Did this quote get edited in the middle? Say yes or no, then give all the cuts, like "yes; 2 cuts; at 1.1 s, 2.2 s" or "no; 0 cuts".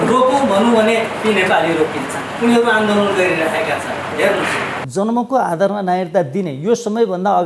yes; 1 cut; at 4.8 s